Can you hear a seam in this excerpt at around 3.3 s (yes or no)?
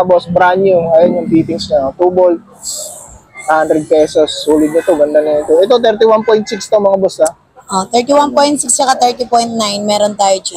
no